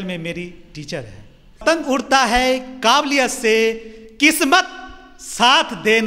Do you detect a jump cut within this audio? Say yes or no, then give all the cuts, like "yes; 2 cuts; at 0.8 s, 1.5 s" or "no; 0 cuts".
yes; 1 cut; at 1.6 s